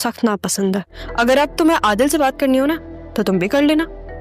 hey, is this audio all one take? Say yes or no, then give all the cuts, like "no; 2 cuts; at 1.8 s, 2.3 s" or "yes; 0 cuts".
no; 1 cut; at 0.9 s